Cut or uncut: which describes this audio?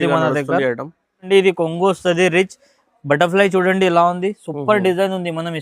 cut